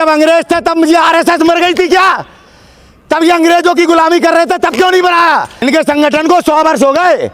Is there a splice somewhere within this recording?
yes; 1 cut; at 5.6 s

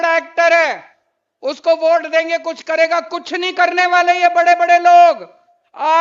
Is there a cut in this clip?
no; 0 cuts

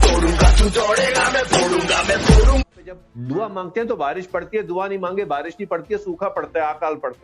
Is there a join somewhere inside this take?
yes; 1 cut; at 2.6 s

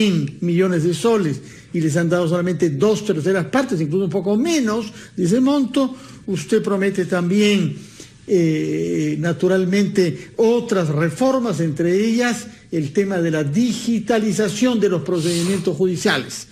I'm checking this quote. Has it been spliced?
yes; 1 cut; at 4.8 s

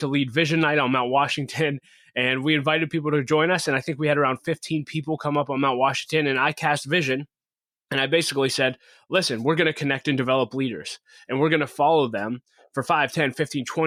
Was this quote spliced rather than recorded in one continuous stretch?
no; 0 cuts

